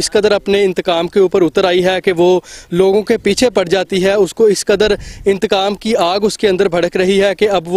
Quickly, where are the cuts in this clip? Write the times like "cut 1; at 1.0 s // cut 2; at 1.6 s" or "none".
none